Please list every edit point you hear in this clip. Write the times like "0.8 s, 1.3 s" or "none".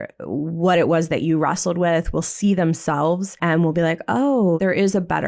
3.3 s, 4.6 s

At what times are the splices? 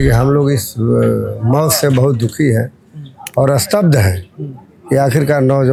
none

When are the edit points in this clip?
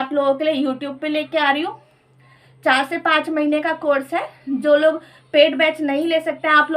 none

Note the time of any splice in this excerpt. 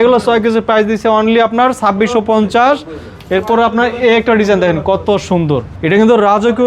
5.7 s

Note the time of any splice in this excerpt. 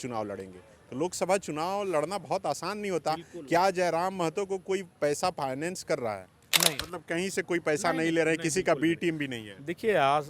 6.8 s

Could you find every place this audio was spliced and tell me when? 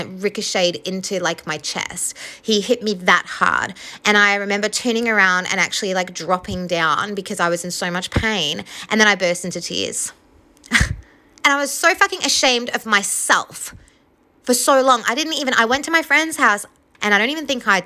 16.9 s

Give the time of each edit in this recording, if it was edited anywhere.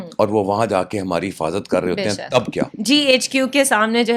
2.7 s

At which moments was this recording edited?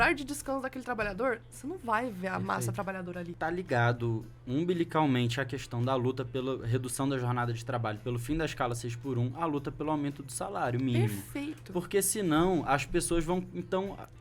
3.3 s

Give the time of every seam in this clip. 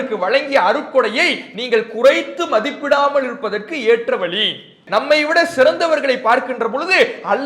4.8 s

